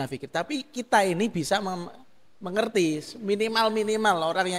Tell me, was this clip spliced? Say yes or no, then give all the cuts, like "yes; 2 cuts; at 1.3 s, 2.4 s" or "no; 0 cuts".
no; 0 cuts